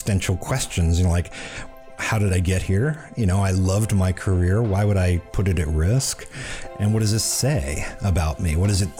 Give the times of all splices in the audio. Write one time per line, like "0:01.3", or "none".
none